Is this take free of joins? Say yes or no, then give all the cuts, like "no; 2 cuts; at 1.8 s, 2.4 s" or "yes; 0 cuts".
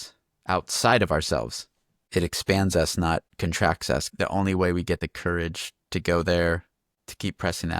no; 4 cuts; at 3.3 s, 4.1 s, 5.0 s, 6.9 s